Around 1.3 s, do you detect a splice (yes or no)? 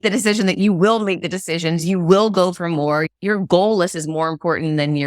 no